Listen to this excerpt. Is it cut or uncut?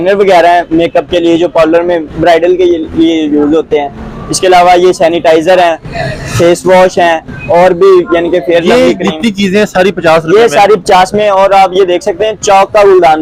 uncut